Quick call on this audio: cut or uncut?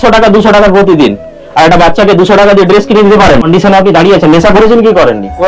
cut